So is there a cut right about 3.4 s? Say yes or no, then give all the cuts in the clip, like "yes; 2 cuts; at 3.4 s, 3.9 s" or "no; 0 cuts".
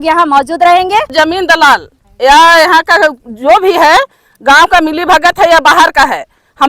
no; 1 cut; at 1.1 s